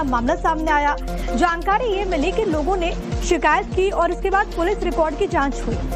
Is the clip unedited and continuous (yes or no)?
no